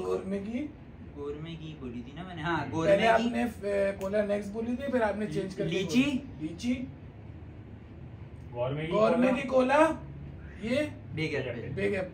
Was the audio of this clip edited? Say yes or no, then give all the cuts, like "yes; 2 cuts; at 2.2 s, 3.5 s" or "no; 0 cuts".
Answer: no; 0 cuts